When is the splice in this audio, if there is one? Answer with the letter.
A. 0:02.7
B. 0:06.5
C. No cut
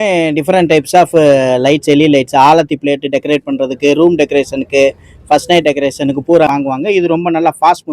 B